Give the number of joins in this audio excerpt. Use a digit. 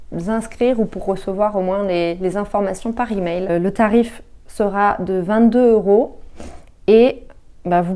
1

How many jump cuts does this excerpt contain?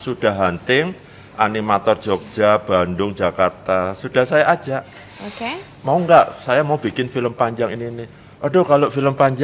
0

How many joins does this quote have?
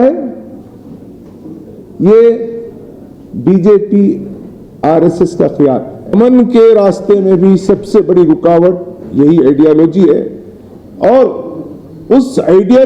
1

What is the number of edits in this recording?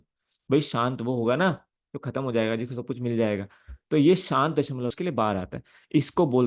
1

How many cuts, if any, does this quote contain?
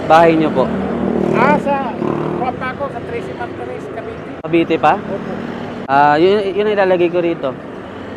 2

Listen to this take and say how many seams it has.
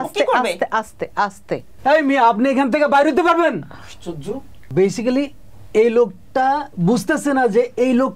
2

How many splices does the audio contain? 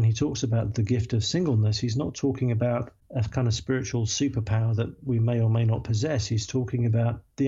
0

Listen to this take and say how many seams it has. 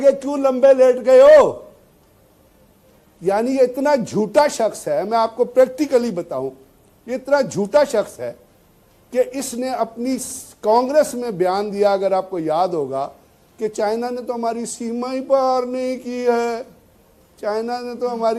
0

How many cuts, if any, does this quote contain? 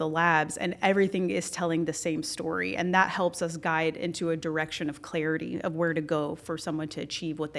0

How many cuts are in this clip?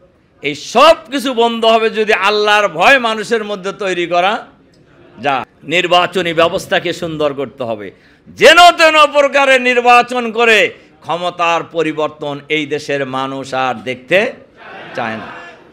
1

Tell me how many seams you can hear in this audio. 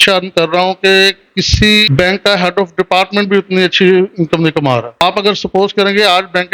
2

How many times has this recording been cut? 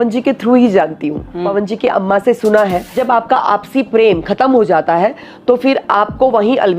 2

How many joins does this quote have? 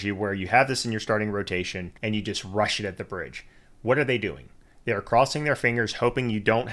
1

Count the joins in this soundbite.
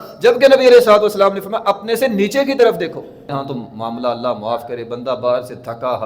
1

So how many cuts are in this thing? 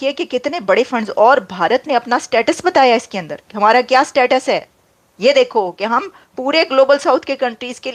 0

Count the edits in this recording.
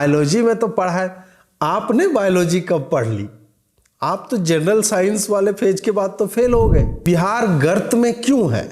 1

